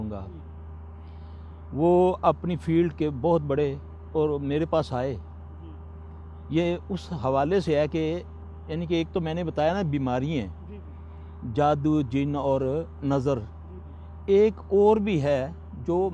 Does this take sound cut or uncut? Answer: cut